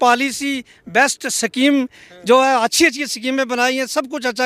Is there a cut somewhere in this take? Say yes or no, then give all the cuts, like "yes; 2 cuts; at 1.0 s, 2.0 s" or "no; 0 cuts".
no; 0 cuts